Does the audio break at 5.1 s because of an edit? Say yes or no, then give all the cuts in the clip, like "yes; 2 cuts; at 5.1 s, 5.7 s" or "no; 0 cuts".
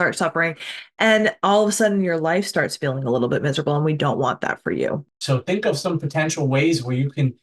yes; 1 cut; at 5.1 s